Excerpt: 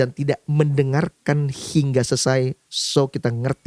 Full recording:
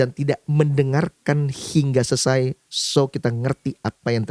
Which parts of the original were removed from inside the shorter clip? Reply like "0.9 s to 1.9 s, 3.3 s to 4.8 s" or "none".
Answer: none